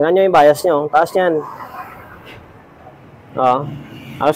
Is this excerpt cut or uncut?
uncut